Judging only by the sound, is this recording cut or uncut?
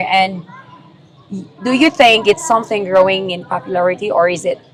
uncut